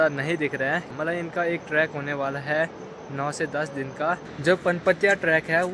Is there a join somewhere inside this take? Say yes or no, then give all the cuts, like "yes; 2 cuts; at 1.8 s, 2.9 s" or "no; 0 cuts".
yes; 2 cuts; at 0.9 s, 4.2 s